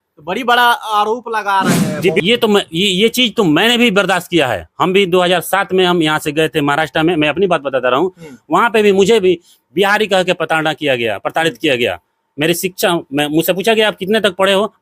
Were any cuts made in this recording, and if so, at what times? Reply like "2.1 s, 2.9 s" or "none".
2.2 s